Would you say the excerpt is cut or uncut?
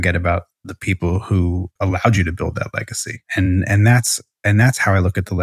cut